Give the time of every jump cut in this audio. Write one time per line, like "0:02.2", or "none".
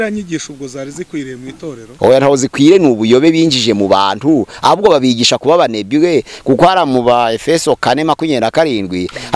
none

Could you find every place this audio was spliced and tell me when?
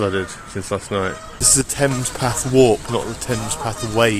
0:01.4

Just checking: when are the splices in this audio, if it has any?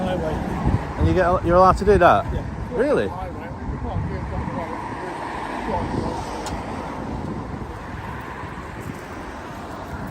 0:02.4

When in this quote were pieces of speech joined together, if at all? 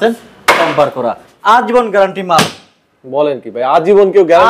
0:01.2

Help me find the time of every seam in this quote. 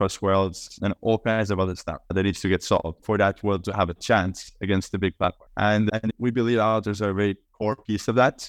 none

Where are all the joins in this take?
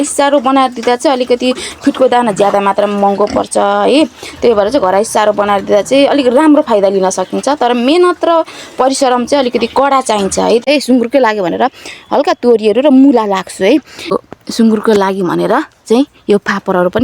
0:10.7
0:14.1

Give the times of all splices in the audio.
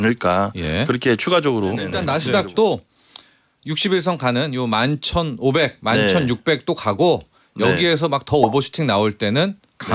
0:02.0

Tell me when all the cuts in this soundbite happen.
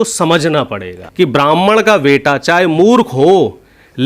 0:01.0

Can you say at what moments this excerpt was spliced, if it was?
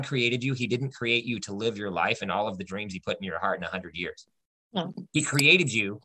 0:05.1

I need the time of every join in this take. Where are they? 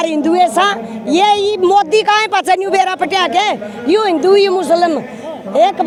none

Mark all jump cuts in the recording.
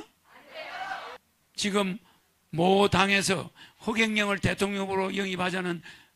0:01.2

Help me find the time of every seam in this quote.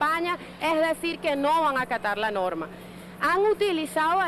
0:02.4

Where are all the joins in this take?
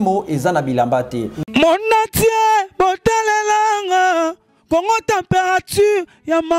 0:01.4

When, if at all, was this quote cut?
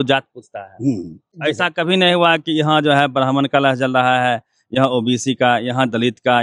0:01.2

